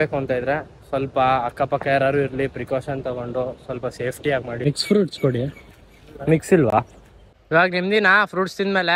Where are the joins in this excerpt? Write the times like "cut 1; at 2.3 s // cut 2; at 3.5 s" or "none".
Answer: none

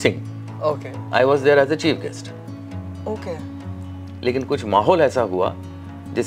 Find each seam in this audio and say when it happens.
none

